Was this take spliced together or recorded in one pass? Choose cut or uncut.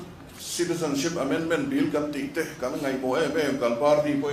uncut